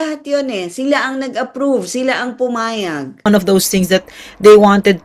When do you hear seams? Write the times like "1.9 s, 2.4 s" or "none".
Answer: 3.3 s